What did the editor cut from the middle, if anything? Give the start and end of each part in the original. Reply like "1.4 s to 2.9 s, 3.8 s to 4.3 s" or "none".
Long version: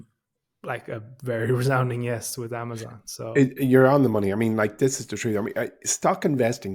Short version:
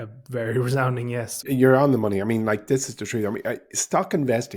2.4 s to 3.5 s